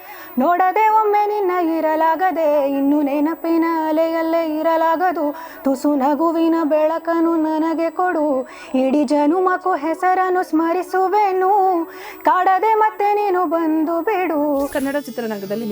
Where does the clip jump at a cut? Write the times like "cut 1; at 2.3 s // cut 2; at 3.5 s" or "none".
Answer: cut 1; at 14.7 s